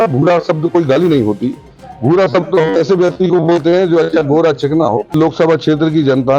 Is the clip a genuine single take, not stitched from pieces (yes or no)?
no